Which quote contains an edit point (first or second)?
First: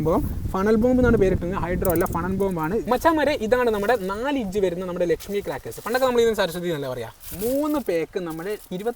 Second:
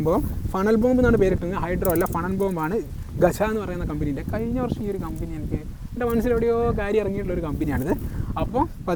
first